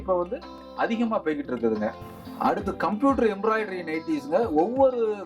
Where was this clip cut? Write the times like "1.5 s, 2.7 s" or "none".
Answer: 2.1 s